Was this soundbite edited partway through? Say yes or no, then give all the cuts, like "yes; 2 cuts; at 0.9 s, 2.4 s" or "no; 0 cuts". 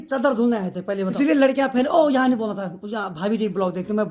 yes; 1 cut; at 1.2 s